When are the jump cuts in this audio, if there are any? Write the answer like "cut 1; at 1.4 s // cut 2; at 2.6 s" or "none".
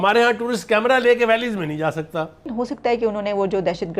cut 1; at 2.5 s